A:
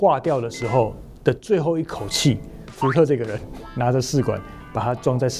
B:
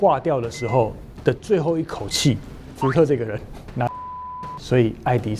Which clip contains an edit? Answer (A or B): B